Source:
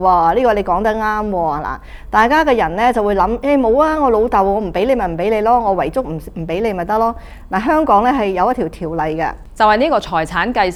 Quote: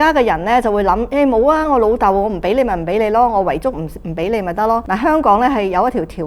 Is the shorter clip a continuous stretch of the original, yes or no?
no